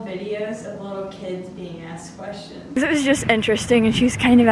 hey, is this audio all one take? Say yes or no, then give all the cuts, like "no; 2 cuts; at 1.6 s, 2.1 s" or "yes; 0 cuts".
no; 1 cut; at 2.6 s